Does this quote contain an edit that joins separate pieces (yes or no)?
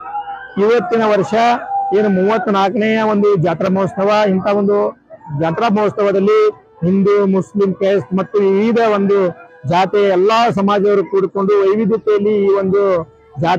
no